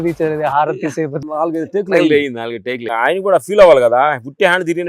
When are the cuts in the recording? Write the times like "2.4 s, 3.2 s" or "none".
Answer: 1.1 s, 2.9 s

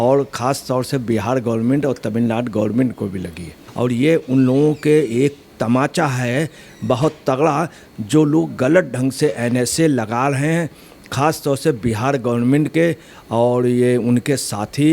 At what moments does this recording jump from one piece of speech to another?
3.6 s

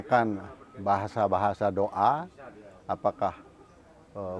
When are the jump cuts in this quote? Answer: none

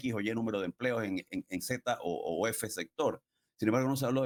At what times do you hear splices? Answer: none

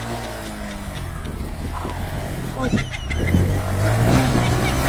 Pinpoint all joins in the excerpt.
none

